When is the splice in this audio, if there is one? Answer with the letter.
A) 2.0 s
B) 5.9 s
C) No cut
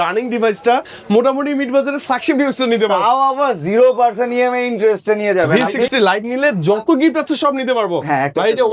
B